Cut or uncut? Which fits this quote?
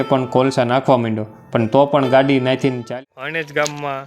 cut